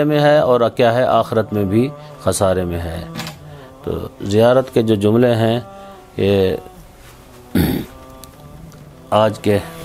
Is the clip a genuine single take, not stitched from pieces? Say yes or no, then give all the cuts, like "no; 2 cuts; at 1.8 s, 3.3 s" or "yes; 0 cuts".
yes; 0 cuts